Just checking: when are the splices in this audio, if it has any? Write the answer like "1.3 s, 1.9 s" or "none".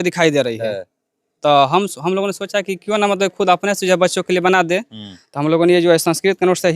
none